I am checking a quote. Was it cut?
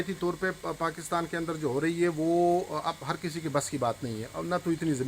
no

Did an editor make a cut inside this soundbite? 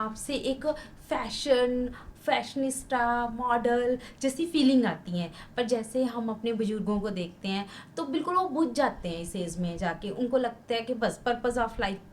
no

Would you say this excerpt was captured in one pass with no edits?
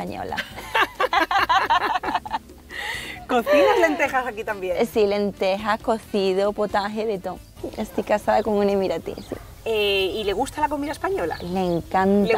yes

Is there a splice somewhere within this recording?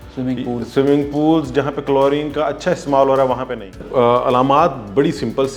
yes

